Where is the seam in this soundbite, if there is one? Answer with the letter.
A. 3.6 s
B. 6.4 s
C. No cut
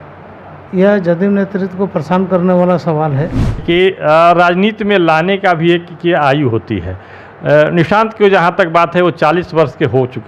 A